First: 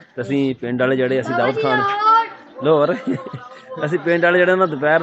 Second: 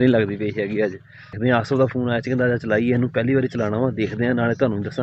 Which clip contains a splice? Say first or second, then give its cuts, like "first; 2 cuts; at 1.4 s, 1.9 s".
second; 1 cut; at 1.4 s